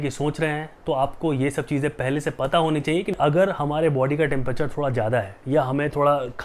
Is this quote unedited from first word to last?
no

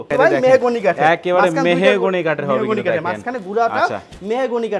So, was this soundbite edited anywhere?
no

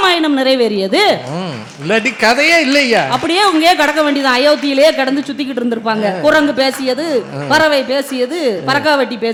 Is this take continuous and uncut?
yes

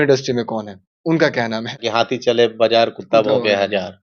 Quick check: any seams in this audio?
yes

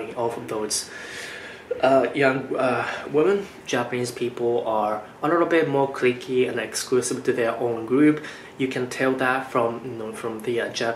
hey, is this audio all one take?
no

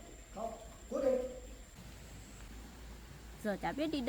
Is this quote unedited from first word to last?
no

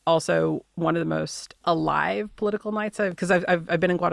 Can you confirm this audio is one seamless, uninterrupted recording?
no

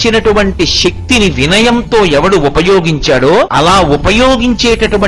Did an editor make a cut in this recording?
yes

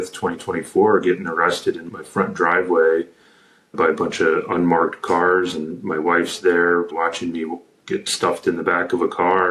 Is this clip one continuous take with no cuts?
yes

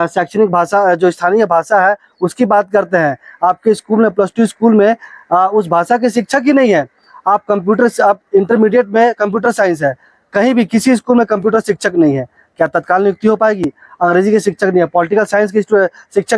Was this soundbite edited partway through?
no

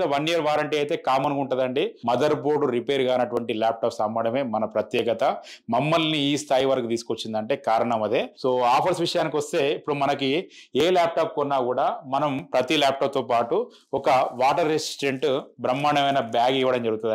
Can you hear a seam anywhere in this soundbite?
yes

